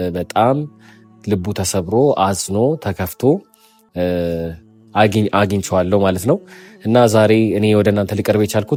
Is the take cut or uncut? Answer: uncut